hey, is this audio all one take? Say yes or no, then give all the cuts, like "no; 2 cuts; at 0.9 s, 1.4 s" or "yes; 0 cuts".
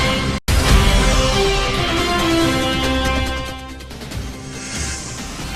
yes; 0 cuts